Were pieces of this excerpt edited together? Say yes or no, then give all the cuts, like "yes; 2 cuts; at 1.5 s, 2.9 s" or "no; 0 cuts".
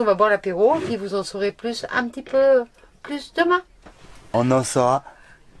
yes; 1 cut; at 4.2 s